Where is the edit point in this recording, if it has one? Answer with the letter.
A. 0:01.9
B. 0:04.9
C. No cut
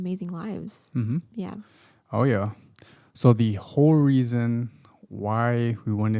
C